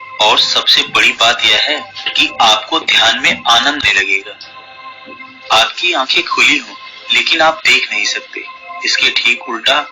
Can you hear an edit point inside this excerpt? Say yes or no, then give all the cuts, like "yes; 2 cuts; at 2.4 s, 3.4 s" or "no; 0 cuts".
yes; 1 cut; at 3.8 s